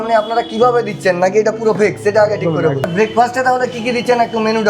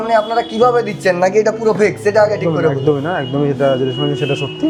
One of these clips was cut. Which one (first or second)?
first